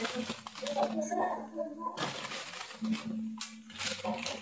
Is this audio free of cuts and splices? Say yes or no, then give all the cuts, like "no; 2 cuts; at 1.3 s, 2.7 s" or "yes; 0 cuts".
yes; 0 cuts